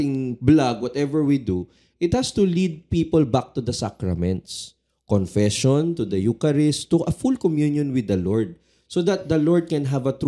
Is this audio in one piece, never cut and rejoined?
yes; 0 cuts

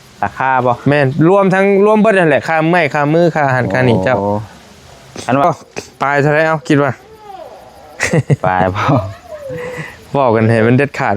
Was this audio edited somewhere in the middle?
yes; 1 cut; at 5.4 s

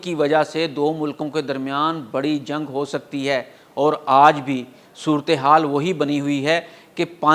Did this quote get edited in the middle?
no; 0 cuts

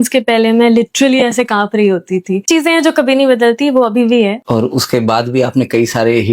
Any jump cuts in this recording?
yes; 2 cuts; at 2.4 s, 4.4 s

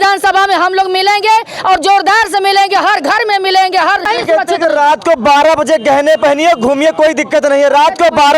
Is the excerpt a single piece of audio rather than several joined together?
no; 1 cut; at 4.0 s

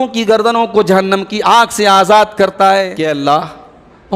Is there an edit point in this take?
yes; 1 cut; at 3.1 s

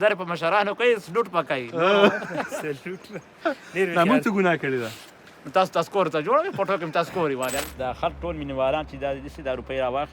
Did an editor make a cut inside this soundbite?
yes; 1 cut; at 7.6 s

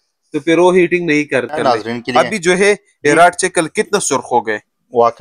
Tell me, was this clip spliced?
yes; 1 cut; at 1.6 s

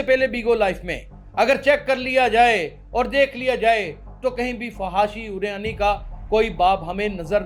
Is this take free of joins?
yes; 0 cuts

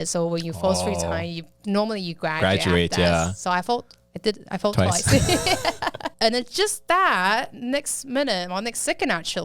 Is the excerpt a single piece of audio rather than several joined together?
no; 1 cut; at 6.0 s

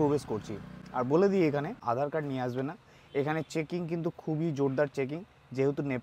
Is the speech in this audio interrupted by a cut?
yes; 1 cut; at 1.8 s

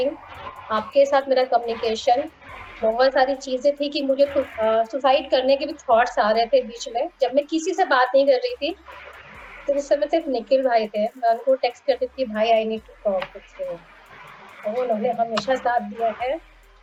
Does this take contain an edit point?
no; 0 cuts

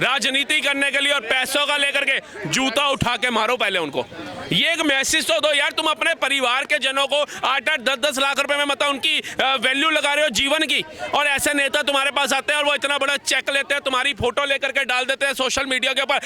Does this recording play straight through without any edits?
yes; 0 cuts

